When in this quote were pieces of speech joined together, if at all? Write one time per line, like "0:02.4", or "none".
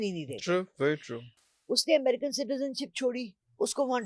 none